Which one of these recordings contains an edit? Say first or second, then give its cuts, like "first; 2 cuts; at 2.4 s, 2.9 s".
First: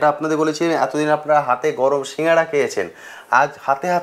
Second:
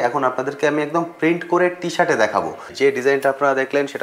second; 1 cut; at 2.7 s